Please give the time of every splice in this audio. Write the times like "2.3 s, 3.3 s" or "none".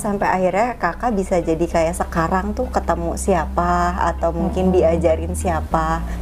none